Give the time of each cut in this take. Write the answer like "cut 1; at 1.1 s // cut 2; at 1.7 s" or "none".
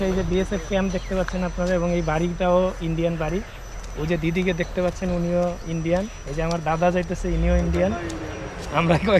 none